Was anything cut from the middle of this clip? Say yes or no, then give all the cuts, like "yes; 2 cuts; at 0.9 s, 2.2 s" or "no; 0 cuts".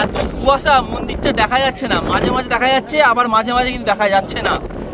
no; 0 cuts